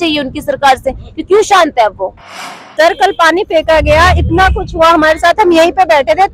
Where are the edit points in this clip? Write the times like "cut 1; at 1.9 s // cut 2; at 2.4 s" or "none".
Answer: cut 1; at 2.3 s